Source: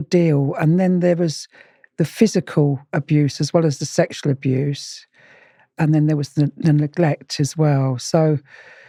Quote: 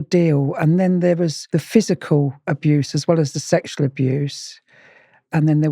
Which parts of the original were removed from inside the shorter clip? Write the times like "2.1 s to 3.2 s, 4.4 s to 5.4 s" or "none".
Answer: 1.4 s to 1.9 s